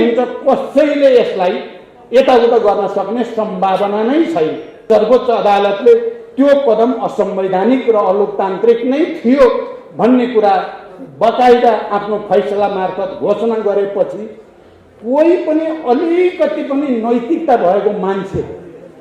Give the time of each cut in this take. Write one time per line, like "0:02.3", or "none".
0:04.8